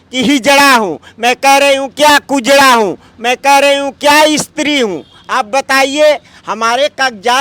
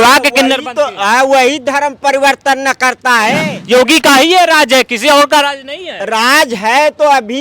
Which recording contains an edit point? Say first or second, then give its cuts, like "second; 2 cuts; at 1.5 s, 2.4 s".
second; 1 cut; at 3.4 s